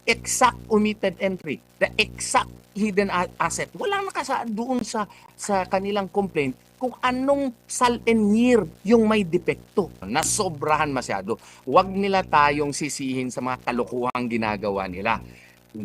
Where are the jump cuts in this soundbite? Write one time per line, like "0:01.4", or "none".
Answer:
0:10.0